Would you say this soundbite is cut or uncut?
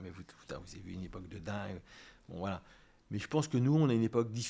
uncut